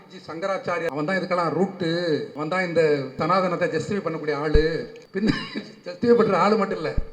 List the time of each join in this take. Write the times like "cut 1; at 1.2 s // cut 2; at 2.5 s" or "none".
cut 1; at 0.9 s // cut 2; at 2.3 s // cut 3; at 3.2 s // cut 4; at 5.0 s